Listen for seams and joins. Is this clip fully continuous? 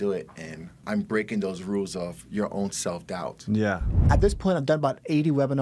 no; 2 cuts; at 0.8 s, 4.0 s

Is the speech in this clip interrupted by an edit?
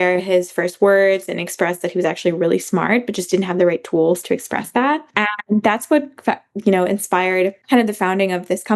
yes; 2 cuts; at 5.1 s, 7.6 s

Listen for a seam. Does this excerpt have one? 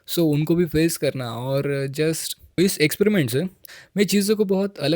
yes; 1 cut; at 2.3 s

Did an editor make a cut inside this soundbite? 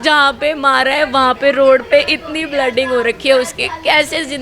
no; 0 cuts

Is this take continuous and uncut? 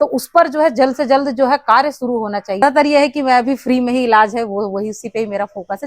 no; 1 cut; at 2.6 s

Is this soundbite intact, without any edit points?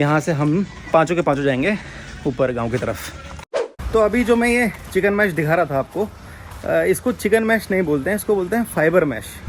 yes; 0 cuts

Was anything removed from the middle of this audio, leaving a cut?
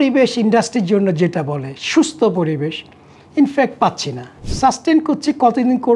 no; 0 cuts

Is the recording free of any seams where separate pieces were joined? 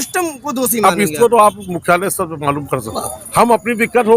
no; 1 cut; at 3.0 s

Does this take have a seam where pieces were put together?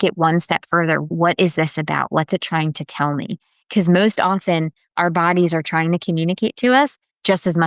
yes; 1 cut; at 1.1 s

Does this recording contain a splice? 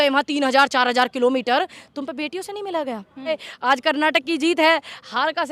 yes; 1 cut; at 3.5 s

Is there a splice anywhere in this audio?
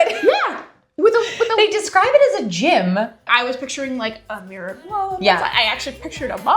yes; 1 cut; at 3.2 s

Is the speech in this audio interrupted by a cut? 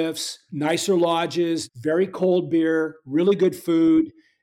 yes; 1 cut; at 1.7 s

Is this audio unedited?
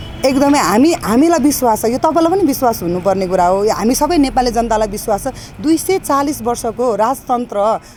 yes; 0 cuts

